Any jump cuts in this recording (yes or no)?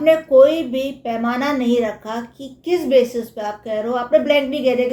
no